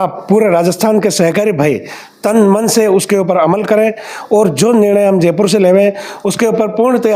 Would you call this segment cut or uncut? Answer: uncut